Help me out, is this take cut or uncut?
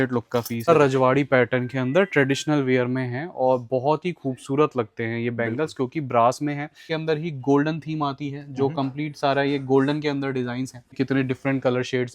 cut